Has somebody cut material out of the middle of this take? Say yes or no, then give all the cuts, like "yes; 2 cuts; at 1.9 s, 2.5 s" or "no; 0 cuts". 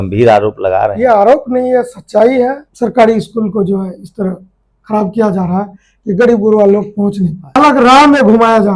yes; 2 cuts; at 2.7 s, 7.6 s